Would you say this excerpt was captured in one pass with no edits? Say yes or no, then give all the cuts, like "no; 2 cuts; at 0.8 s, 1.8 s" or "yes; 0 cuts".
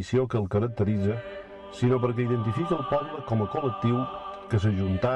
yes; 0 cuts